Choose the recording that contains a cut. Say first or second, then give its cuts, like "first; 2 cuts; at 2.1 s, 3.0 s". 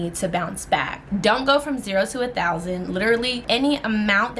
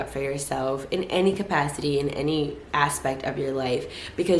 first; 2 cuts; at 1.0 s, 3.4 s